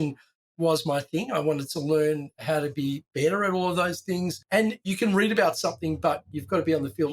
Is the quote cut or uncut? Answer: cut